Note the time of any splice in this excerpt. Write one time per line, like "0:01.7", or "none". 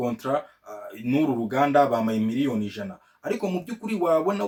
none